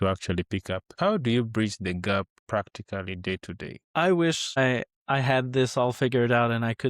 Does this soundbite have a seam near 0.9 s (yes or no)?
yes